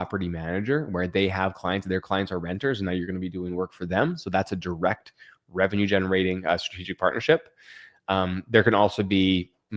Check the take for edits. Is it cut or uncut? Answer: uncut